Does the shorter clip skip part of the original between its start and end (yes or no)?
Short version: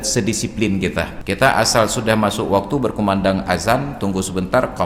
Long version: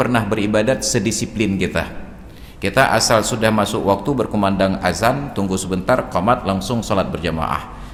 yes